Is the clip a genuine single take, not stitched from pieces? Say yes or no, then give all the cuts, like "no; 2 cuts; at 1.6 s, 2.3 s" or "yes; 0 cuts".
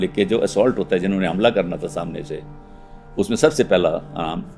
yes; 0 cuts